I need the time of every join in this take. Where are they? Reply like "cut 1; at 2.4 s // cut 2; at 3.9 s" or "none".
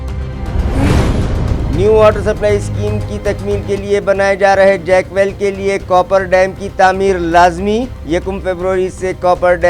cut 1; at 1.2 s